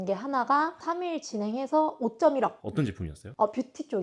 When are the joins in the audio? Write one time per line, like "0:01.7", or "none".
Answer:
none